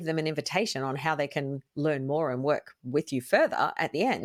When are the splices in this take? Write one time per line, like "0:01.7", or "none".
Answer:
none